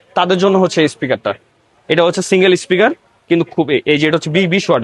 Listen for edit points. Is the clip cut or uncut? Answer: uncut